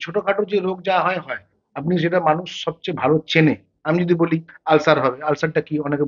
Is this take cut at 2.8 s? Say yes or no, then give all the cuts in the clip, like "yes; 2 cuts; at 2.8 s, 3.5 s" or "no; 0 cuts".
no; 0 cuts